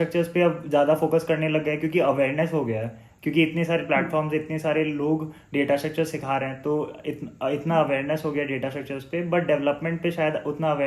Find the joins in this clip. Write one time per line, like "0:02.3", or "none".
none